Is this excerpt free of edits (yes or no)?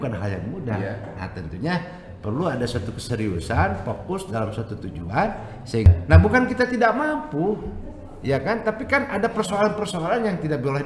no